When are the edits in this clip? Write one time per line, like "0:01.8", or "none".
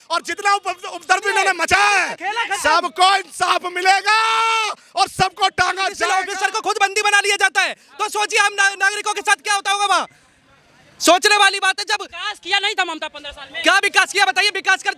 0:06.0